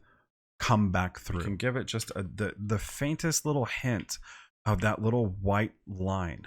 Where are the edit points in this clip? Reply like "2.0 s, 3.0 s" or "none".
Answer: 1.5 s